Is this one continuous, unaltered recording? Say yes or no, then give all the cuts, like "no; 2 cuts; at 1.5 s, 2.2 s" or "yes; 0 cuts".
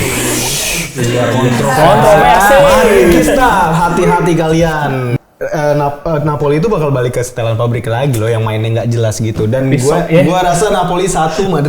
no; 1 cut; at 5.1 s